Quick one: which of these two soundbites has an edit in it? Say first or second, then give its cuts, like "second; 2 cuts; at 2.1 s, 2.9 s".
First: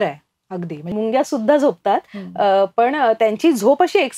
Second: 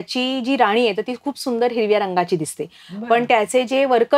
first; 1 cut; at 0.9 s